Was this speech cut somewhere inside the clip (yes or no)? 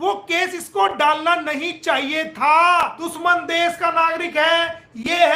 yes